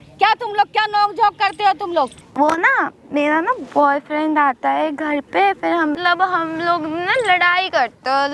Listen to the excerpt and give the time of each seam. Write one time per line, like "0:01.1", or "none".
0:02.2
0:06.0